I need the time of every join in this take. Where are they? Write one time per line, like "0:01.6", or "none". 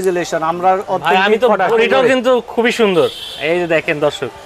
0:01.7